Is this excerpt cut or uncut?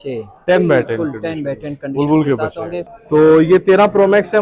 cut